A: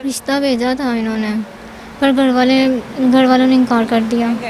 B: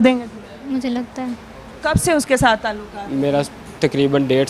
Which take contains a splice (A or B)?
B